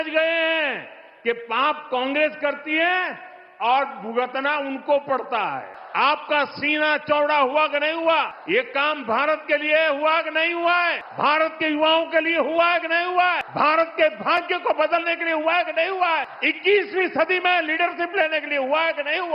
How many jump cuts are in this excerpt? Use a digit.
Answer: 5